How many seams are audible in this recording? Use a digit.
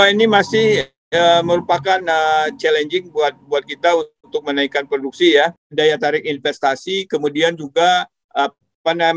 1